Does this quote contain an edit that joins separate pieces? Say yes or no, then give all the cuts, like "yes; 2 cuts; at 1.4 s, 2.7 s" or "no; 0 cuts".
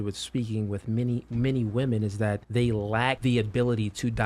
yes; 2 cuts; at 2.4 s, 3.2 s